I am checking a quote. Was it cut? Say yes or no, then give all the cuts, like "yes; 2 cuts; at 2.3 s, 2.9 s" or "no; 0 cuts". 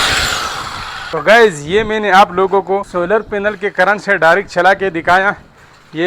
yes; 1 cut; at 0.9 s